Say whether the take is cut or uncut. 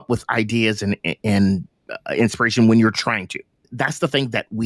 cut